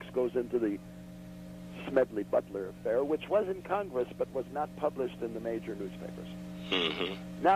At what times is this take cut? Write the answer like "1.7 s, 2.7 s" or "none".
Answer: none